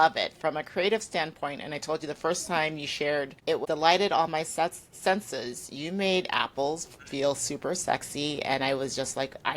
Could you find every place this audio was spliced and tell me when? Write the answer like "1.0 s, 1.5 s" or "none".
3.5 s